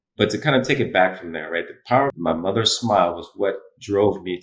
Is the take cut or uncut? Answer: cut